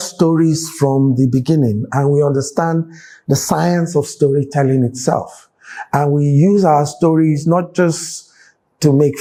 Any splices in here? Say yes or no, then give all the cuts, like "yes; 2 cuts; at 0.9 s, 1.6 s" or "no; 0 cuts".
no; 0 cuts